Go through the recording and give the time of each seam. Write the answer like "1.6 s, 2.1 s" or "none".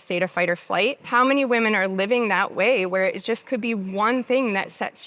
1.0 s